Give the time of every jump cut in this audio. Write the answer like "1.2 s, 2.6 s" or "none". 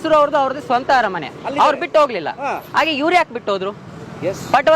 none